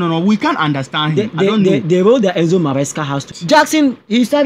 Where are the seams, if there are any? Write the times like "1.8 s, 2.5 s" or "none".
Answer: 3.3 s